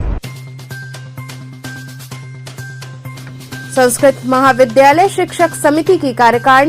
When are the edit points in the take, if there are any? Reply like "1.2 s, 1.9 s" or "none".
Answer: 1.9 s